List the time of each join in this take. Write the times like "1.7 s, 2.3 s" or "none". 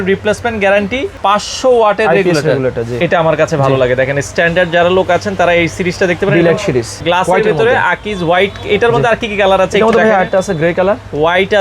1.1 s, 2.9 s, 6.9 s